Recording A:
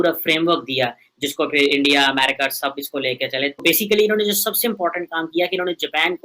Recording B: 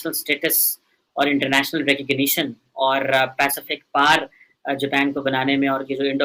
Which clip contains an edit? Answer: A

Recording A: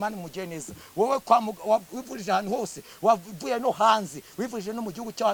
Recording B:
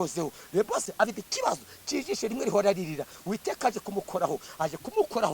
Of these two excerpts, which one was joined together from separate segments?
B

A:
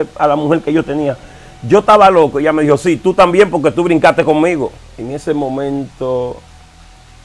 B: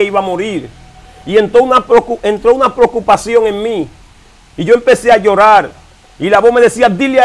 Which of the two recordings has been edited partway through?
A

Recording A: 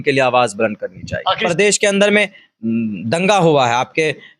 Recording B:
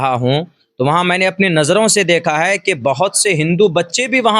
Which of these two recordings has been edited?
A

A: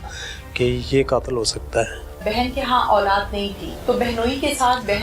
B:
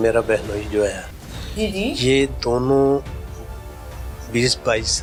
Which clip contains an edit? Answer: A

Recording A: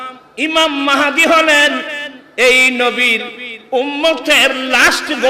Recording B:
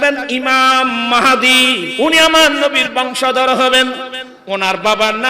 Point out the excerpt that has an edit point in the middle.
B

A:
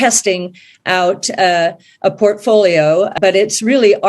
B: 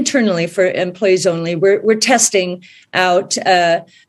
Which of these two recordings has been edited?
A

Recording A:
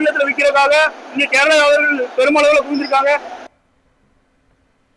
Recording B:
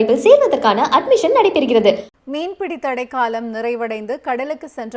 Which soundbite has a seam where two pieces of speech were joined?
B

